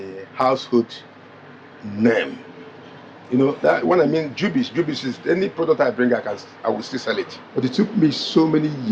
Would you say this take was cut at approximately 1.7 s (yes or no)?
no